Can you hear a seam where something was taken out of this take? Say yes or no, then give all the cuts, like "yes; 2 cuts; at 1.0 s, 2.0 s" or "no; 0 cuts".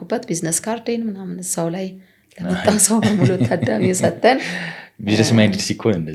no; 0 cuts